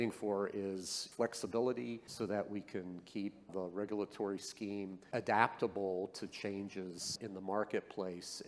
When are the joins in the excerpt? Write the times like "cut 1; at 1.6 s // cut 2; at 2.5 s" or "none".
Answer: cut 1; at 1.0 s // cut 2; at 2.1 s // cut 3; at 3.5 s // cut 4; at 5.0 s // cut 5; at 7.2 s